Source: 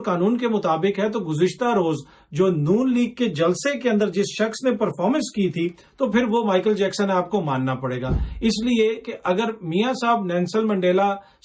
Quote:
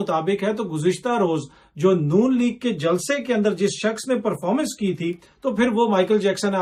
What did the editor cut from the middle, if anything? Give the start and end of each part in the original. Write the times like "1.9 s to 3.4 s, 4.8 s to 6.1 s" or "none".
none